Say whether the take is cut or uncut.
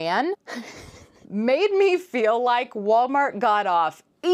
uncut